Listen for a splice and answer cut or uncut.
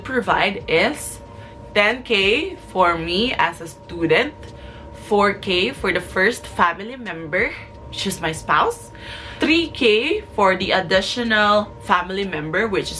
uncut